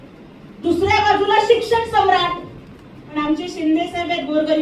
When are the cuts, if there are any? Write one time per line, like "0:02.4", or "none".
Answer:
0:02.9